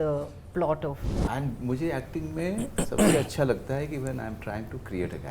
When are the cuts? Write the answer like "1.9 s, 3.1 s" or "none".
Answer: 1.1 s